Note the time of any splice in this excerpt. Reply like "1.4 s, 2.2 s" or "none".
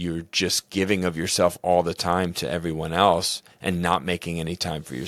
none